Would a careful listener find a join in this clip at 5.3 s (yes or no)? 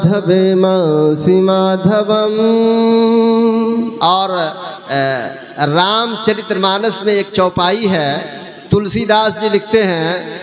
no